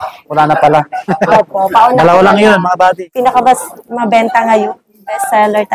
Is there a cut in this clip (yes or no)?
yes